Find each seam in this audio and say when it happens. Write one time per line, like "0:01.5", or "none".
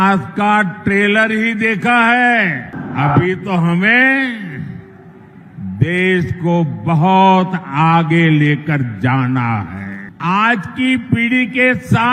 none